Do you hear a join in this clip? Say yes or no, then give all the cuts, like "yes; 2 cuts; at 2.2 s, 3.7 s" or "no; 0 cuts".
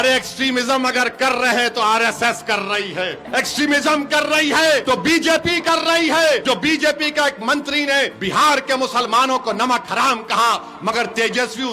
yes; 4 cuts; at 3.2 s, 4.8 s, 6.4 s, 8.2 s